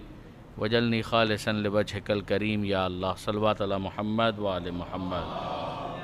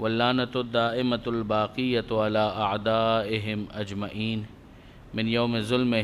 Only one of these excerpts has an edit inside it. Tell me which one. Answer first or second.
second